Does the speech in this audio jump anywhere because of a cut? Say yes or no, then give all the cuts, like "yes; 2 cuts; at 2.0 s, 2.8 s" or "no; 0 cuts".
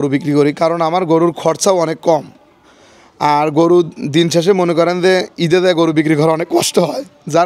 no; 0 cuts